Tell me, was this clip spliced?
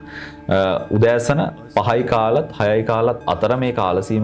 no; 0 cuts

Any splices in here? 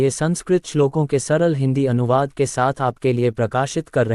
no; 0 cuts

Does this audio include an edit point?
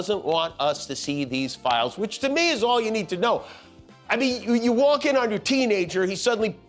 no; 0 cuts

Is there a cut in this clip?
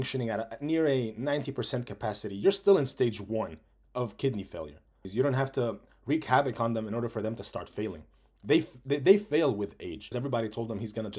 yes; 2 cuts; at 5.1 s, 10.1 s

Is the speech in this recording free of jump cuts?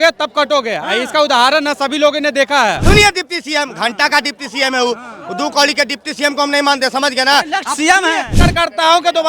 no; 2 cuts; at 2.8 s, 8.4 s

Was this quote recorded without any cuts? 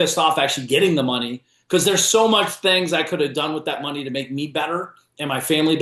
yes; 0 cuts

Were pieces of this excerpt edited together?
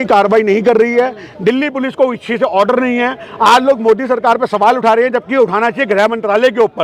no; 0 cuts

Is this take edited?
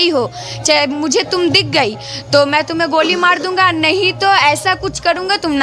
no; 0 cuts

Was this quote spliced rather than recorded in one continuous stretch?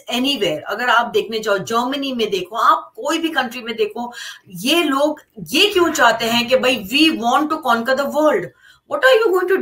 no; 0 cuts

